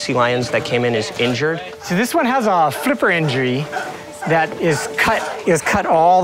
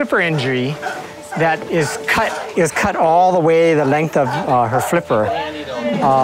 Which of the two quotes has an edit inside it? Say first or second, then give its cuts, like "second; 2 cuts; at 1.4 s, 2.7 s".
first; 1 cut; at 1.7 s